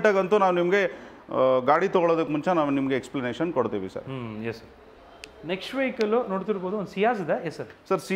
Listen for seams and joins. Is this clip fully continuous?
yes; 0 cuts

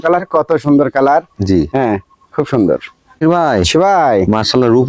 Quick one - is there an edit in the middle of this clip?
no; 0 cuts

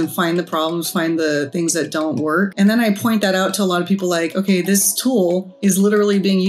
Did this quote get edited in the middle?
yes; 2 cuts; at 2.5 s, 5.5 s

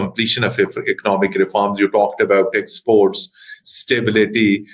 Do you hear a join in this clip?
no; 0 cuts

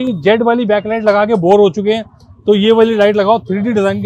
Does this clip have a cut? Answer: no; 0 cuts

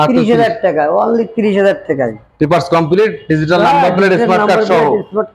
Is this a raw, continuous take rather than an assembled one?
yes; 0 cuts

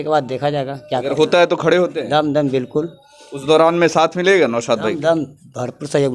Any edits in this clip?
no; 0 cuts

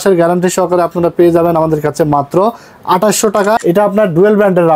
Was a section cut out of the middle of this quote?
yes; 1 cut; at 3.6 s

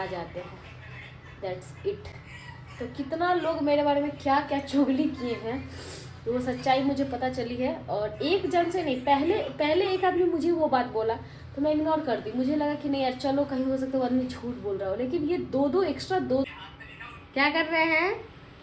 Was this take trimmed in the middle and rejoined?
yes; 1 cut; at 16.5 s

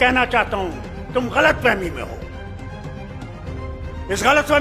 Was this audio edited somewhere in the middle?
no; 0 cuts

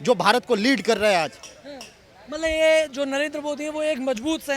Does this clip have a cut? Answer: no; 0 cuts

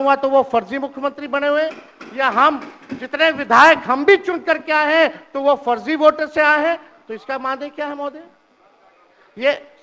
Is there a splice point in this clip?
no; 0 cuts

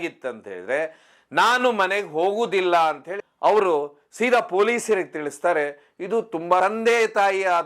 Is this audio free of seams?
no; 1 cut; at 3.2 s

